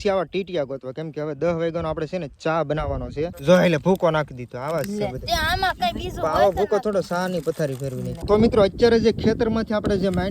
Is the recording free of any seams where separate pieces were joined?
no; 2 cuts; at 3.4 s, 8.1 s

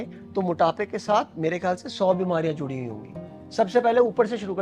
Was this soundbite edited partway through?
no; 0 cuts

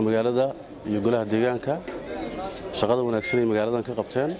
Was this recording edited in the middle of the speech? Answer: no; 0 cuts

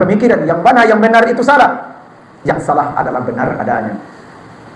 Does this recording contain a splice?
no; 0 cuts

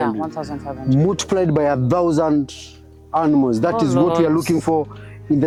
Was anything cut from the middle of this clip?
no; 0 cuts

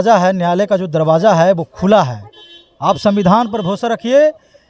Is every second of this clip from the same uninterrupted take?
yes; 0 cuts

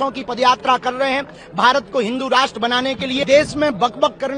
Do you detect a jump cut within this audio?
yes; 1 cut; at 3.2 s

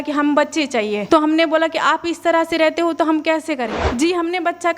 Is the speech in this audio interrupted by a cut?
yes; 2 cuts; at 1.0 s, 3.8 s

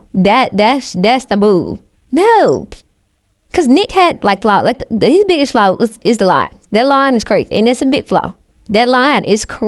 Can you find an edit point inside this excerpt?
no; 0 cuts

